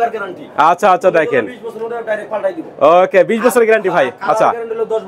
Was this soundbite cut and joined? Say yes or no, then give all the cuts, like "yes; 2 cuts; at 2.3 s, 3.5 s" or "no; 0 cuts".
no; 0 cuts